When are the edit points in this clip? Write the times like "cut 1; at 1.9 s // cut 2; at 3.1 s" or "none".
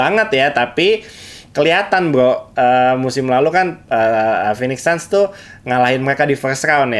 none